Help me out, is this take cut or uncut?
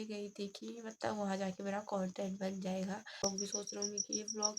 cut